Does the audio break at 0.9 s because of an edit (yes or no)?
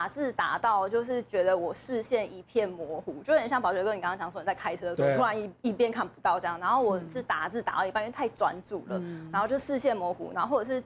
no